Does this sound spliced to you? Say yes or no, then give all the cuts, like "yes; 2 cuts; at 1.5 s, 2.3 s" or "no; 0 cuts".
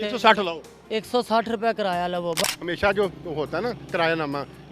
yes; 1 cut; at 2.4 s